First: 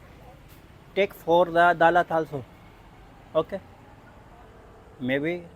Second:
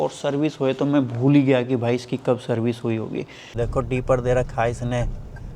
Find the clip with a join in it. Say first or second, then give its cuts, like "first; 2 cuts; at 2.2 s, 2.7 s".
second; 1 cut; at 3.5 s